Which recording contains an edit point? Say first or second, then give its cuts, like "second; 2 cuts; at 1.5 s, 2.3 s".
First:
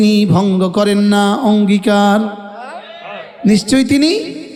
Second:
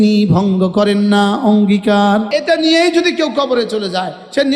second; 1 cut; at 2.3 s